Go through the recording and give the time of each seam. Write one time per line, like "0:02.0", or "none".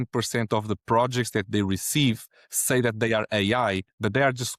none